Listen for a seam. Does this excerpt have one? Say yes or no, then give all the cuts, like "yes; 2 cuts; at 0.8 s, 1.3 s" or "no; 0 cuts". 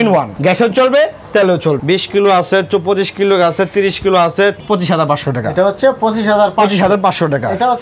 yes; 2 cuts; at 1.8 s, 4.6 s